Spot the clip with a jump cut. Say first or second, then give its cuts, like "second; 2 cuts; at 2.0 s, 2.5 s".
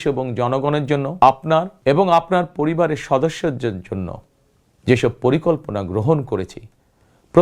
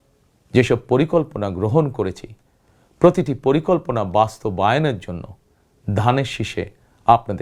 first; 2 cuts; at 1.1 s, 1.7 s